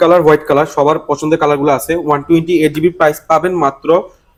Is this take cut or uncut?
uncut